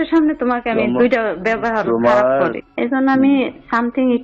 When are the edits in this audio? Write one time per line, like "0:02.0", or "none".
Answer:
0:02.6